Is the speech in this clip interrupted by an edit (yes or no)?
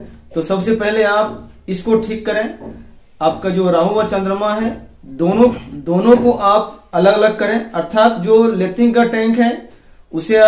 no